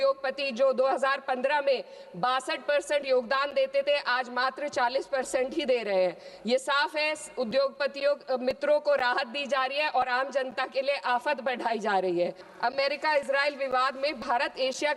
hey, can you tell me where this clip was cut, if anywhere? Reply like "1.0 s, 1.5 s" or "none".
12.4 s